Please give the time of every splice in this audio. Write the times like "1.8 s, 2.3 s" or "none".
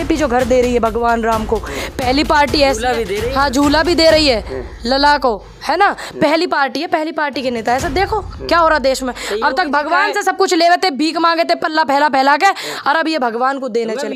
none

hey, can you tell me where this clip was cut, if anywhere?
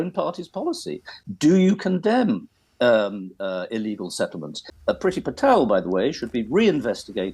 4.7 s

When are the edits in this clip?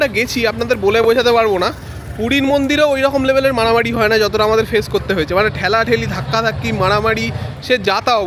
none

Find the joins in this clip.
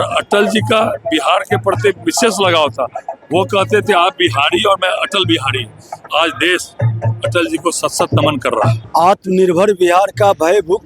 8.8 s

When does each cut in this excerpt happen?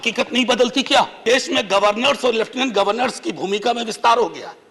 1.2 s

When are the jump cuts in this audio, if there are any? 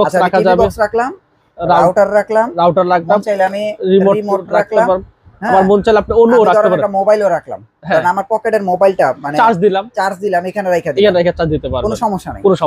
none

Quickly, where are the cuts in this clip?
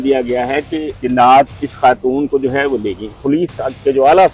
0.9 s, 1.6 s, 3.2 s

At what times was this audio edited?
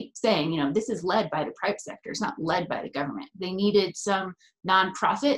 none

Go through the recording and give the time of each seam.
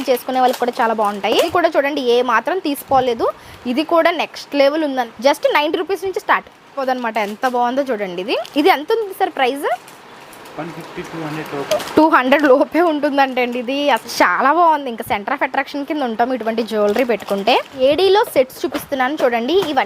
1.5 s, 5.1 s, 6.8 s, 14.1 s, 17.7 s

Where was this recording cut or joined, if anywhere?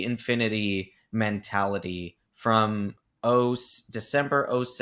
none

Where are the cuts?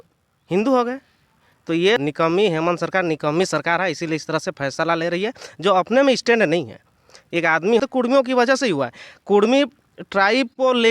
2.0 s, 7.8 s

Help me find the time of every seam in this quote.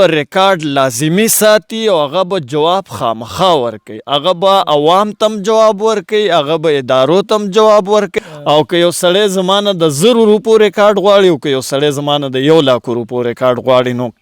8.1 s

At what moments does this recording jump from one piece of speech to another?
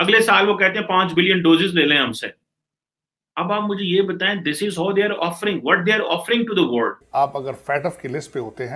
7.0 s

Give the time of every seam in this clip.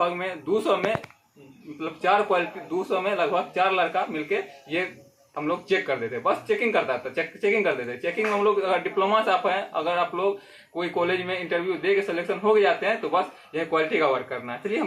none

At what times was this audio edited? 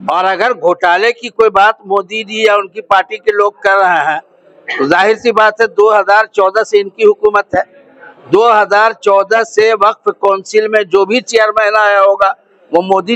none

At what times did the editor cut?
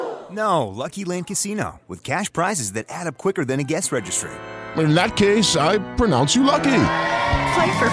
none

